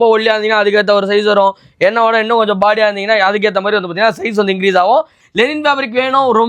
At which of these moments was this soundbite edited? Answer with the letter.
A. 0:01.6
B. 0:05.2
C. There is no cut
B